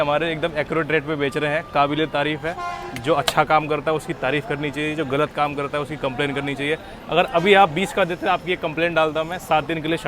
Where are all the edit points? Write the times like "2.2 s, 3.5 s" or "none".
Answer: none